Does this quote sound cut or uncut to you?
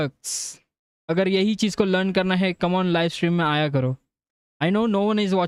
uncut